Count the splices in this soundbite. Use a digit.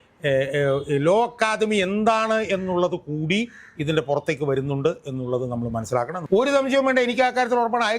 1